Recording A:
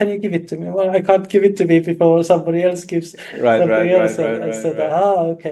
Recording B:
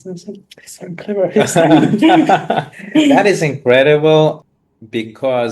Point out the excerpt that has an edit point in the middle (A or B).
B